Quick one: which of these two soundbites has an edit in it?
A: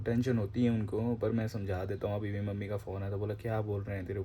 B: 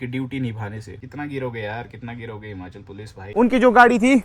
B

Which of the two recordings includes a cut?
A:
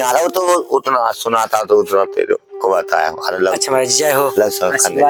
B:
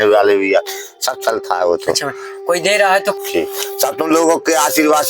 B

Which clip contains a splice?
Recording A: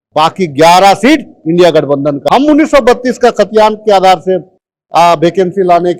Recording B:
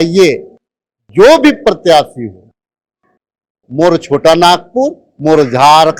A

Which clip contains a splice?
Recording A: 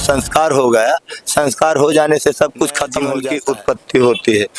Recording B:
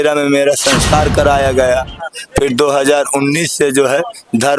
A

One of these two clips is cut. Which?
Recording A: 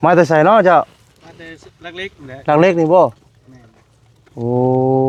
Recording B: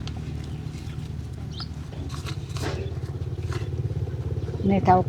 B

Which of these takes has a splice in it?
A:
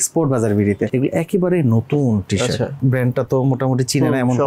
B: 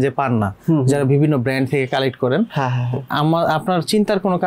A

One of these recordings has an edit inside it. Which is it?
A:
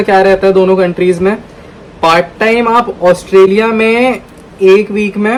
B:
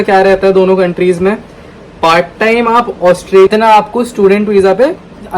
B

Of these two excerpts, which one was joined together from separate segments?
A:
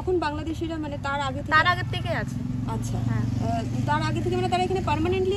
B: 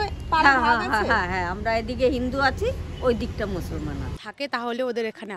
B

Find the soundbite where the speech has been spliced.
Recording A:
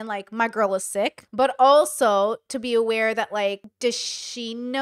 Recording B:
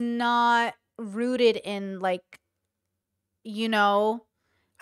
A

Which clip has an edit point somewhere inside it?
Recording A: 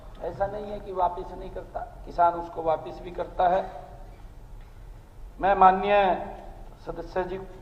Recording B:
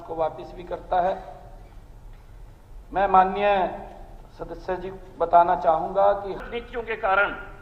B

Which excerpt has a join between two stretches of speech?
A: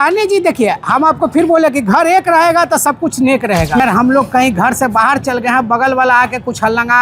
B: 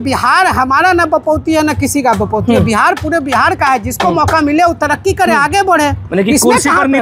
A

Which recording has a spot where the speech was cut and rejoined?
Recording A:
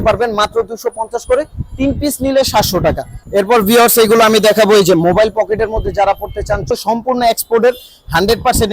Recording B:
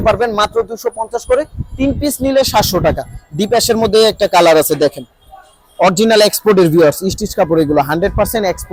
A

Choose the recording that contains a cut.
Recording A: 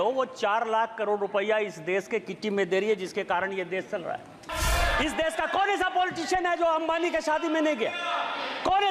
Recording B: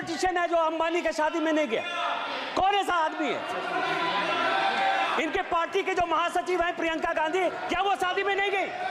A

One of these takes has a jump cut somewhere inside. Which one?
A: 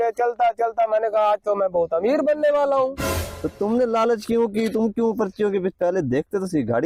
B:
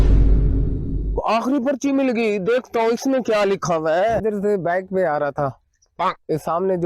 B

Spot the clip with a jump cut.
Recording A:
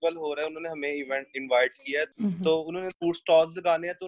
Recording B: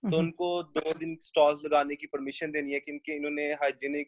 A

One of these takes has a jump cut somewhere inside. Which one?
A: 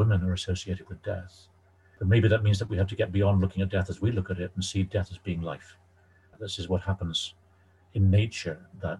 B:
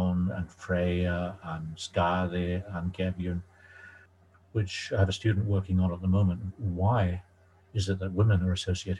A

